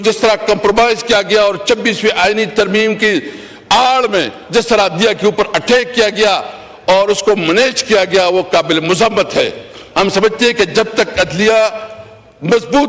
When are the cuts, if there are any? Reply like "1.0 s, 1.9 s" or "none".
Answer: none